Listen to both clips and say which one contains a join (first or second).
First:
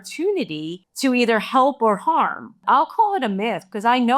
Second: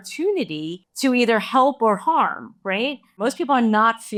first